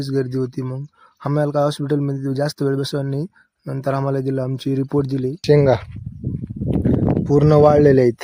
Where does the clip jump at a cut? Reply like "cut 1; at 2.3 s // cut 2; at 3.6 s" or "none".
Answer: cut 1; at 5.4 s